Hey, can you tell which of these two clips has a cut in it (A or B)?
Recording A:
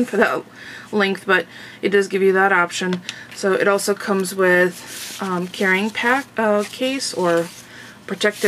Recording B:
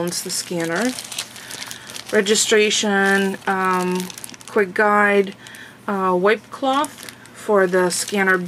A